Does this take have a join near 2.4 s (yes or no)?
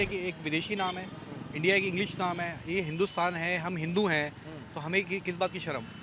no